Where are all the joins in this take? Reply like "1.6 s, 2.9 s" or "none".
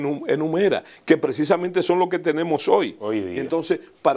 none

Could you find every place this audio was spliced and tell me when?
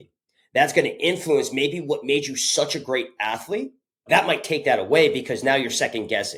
none

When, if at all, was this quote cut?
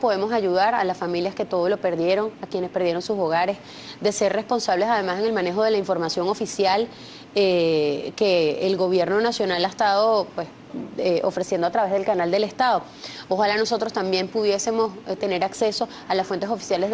6.9 s

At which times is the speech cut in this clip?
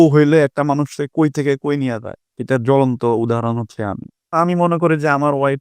4.3 s

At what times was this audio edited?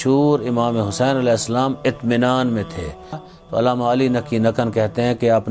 3.3 s

